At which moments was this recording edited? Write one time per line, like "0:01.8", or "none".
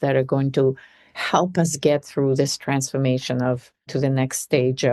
0:03.9

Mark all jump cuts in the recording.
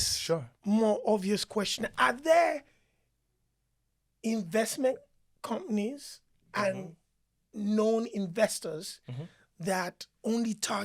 none

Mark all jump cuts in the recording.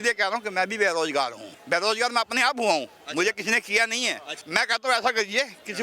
0:01.5
0:04.3

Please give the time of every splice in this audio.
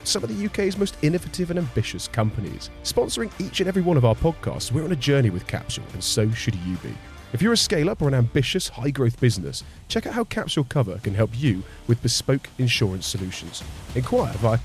none

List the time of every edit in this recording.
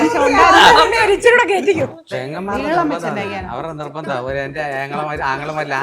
0:01.9

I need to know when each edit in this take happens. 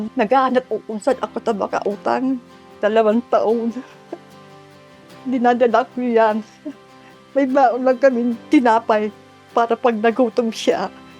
0:02.7

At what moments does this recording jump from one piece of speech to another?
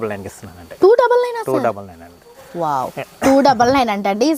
none

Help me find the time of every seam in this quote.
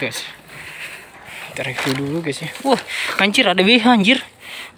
none

